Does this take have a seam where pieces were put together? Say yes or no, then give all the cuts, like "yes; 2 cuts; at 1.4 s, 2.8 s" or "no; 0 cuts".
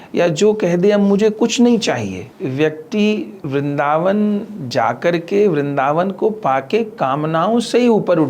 yes; 2 cuts; at 2.3 s, 3.3 s